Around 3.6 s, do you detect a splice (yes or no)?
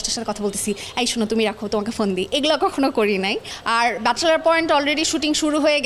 yes